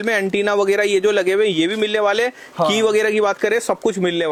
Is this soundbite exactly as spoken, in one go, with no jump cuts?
yes; 0 cuts

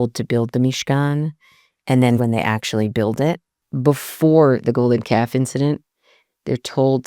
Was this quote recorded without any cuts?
no; 2 cuts; at 2.2 s, 3.7 s

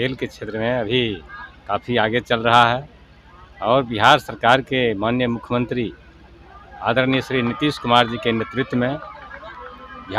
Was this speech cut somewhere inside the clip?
no; 0 cuts

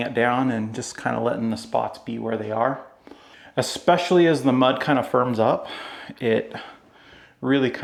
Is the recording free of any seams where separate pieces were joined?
yes; 0 cuts

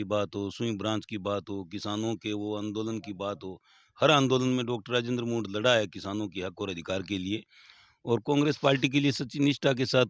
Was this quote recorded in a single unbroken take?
yes; 0 cuts

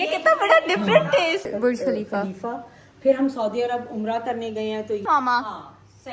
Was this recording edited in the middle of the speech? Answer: yes; 2 cuts; at 1.5 s, 5.0 s

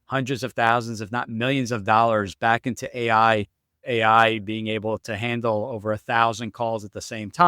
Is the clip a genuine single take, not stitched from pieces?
no; 1 cut; at 3.8 s

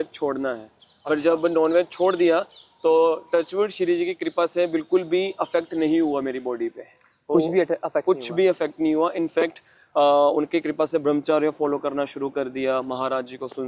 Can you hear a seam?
no; 0 cuts

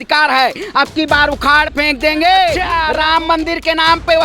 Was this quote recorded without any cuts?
no; 1 cut; at 2.6 s

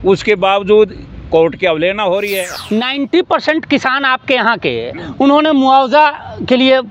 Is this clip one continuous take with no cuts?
no; 1 cut; at 2.5 s

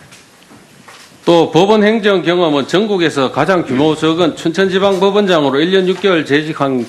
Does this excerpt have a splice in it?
yes; 1 cut; at 5.4 s

